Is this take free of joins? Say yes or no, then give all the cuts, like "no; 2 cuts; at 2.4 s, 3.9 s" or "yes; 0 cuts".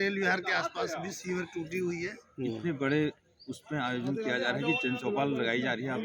no; 1 cut; at 2.2 s